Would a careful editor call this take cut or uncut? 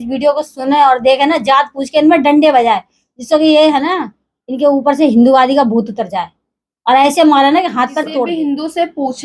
cut